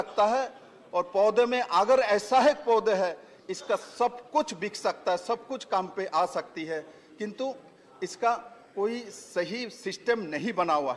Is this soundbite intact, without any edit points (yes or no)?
yes